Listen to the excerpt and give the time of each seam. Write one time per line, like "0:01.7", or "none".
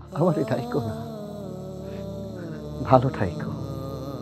none